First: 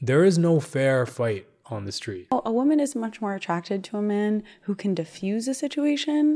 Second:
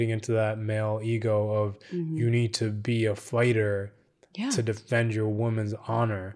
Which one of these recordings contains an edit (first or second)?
first